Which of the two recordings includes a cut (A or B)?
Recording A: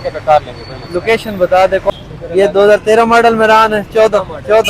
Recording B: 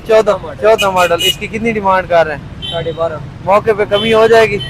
A